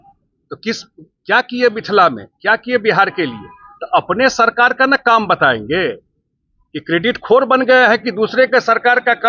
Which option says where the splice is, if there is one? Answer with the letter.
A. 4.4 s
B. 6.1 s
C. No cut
C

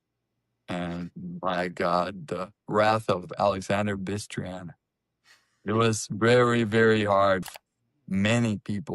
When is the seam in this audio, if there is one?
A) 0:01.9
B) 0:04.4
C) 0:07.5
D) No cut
C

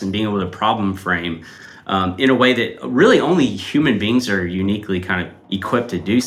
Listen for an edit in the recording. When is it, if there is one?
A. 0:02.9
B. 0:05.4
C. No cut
B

